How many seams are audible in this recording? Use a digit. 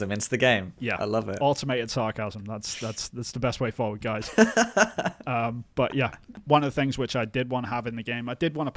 1